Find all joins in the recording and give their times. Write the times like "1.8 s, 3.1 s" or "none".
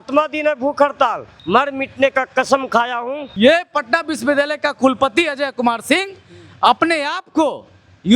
1.3 s, 3.2 s